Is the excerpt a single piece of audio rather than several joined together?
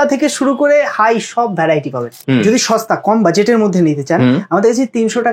no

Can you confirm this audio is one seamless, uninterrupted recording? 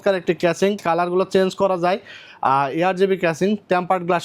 yes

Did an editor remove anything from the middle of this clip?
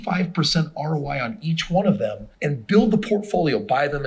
yes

